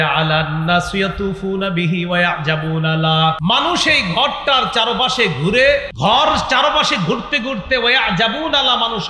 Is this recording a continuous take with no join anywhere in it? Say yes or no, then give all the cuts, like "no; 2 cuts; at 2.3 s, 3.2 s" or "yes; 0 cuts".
no; 2 cuts; at 3.4 s, 5.9 s